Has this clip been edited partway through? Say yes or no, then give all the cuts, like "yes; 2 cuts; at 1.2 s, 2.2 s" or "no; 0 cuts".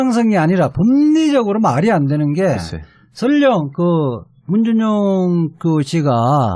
no; 0 cuts